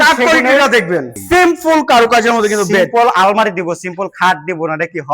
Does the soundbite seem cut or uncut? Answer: cut